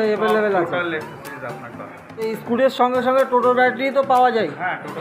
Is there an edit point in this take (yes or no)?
yes